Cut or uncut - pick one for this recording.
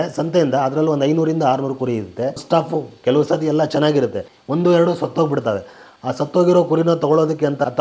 uncut